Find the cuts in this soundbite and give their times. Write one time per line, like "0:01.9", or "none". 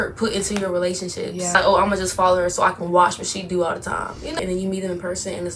0:01.6
0:04.4